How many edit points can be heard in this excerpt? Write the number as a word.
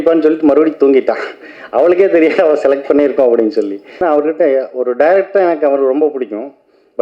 one